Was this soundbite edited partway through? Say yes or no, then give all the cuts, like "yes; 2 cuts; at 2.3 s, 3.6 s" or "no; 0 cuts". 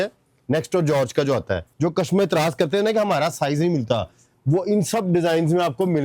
yes; 1 cut; at 1.6 s